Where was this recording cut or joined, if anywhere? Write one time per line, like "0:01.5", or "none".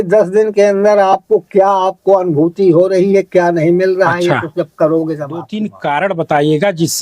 0:05.6